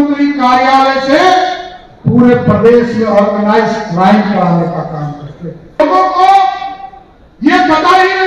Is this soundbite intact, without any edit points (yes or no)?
no